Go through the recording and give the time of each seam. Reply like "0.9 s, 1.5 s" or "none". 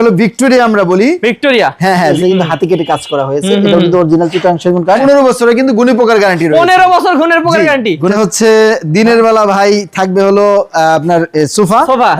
2.2 s, 5.0 s, 8.1 s